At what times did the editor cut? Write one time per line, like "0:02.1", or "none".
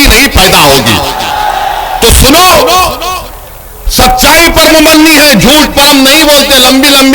none